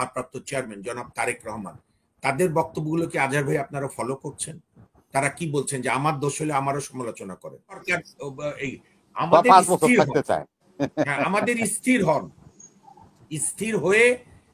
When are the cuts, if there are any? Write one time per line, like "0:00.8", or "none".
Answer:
0:07.8